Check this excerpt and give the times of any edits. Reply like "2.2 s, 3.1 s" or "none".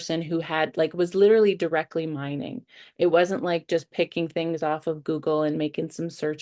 none